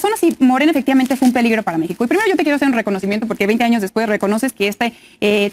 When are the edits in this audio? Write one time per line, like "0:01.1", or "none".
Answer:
none